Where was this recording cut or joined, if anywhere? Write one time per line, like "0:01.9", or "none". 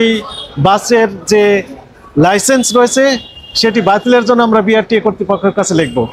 none